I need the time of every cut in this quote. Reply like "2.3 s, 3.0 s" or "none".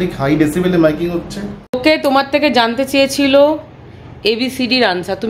1.6 s